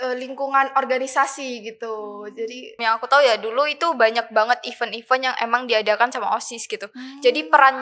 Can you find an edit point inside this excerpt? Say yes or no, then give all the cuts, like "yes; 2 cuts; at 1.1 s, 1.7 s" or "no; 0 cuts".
yes; 1 cut; at 2.7 s